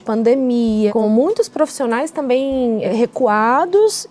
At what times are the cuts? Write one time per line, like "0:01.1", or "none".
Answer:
0:01.0
0:02.9